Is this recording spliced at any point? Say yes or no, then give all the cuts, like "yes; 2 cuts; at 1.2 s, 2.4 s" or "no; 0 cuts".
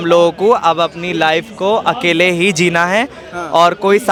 no; 0 cuts